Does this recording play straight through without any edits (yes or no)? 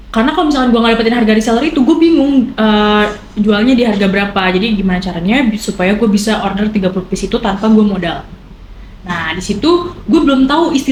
yes